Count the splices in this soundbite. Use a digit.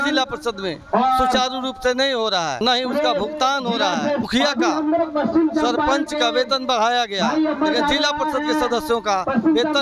2